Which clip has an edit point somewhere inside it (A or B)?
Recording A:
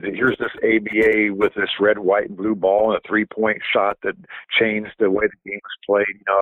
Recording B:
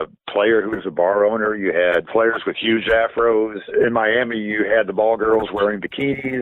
B